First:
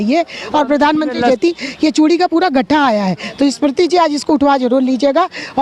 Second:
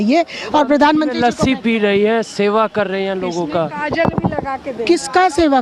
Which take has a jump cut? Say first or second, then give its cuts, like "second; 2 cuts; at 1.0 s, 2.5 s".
first; 1 cut; at 1.3 s